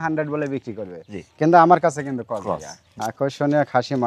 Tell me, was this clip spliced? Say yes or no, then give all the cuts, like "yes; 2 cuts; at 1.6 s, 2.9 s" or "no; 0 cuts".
yes; 1 cut; at 2.8 s